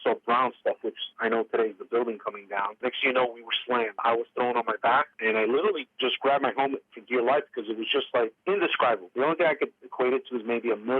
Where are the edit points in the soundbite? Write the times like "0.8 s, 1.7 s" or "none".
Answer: 2.8 s, 4.0 s, 5.1 s